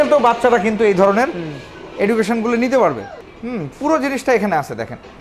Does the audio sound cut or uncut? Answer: uncut